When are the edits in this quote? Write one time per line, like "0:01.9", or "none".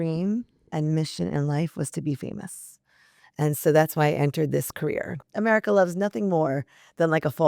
0:05.3